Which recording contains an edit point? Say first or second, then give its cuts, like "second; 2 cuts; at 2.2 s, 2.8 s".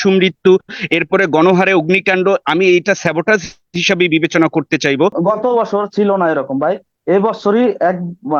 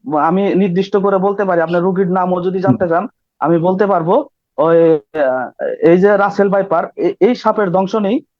first; 1 cut; at 5.2 s